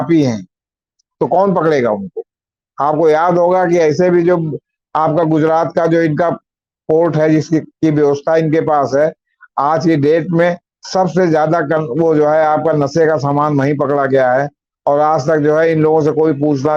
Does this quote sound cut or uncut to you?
uncut